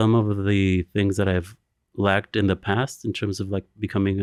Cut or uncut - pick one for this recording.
uncut